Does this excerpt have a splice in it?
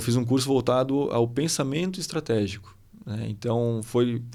no; 0 cuts

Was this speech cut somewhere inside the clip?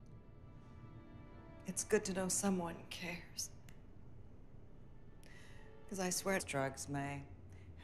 no; 0 cuts

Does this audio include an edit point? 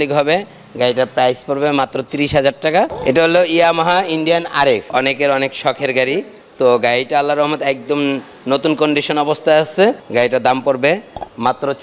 yes; 4 cuts; at 3.0 s, 4.8 s, 6.4 s, 10.0 s

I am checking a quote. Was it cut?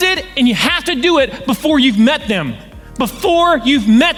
no; 0 cuts

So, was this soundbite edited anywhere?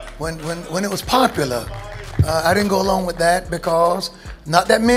yes; 1 cut; at 0.9 s

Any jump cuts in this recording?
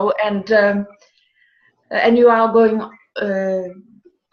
yes; 1 cut; at 2.4 s

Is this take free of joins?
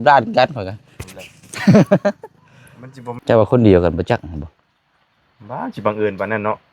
no; 1 cut; at 3.1 s

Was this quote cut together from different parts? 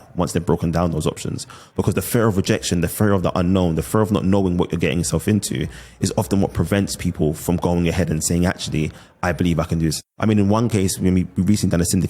yes; 1 cut; at 9.9 s

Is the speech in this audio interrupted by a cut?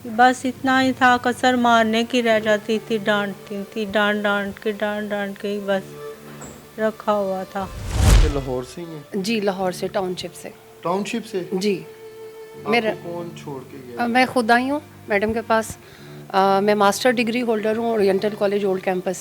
no; 0 cuts

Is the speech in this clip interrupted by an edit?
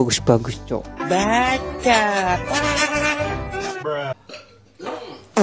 yes; 1 cut; at 4.2 s

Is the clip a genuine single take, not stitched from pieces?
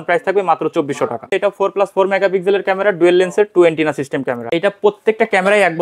no; 2 cuts; at 1.3 s, 4.4 s

